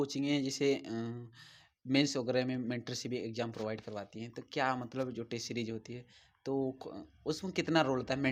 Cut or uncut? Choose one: uncut